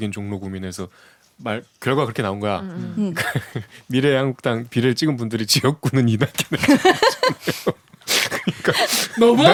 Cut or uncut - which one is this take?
uncut